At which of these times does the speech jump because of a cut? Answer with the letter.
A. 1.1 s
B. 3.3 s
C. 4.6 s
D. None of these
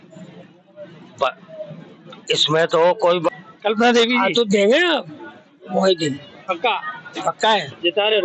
B